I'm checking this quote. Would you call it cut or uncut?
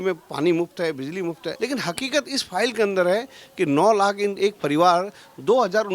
cut